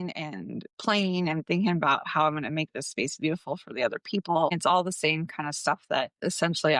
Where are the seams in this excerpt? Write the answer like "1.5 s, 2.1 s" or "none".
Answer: 4.5 s